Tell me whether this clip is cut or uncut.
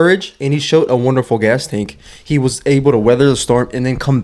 uncut